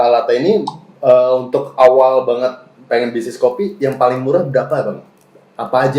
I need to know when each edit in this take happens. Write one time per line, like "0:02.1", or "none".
none